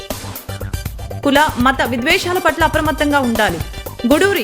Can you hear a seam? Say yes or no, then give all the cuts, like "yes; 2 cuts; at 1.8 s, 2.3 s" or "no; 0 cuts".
yes; 1 cut; at 0.9 s